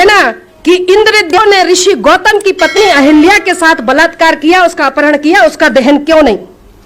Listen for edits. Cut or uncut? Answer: cut